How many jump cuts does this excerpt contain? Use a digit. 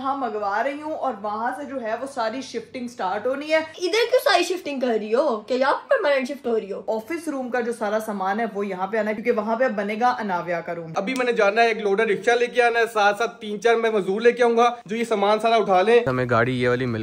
5